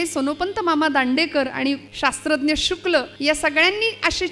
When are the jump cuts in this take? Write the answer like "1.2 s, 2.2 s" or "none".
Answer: 1.9 s, 3.1 s